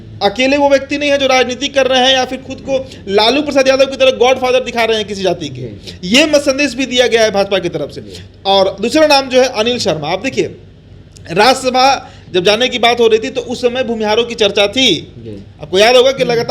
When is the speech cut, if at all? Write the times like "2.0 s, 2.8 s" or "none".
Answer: none